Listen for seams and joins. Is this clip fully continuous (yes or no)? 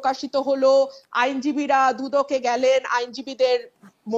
yes